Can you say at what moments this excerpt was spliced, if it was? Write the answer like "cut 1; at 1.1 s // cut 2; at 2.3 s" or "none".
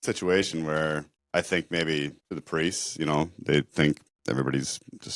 cut 1; at 1.1 s // cut 2; at 2.2 s // cut 3; at 4.1 s